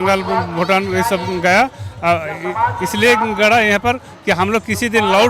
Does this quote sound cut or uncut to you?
uncut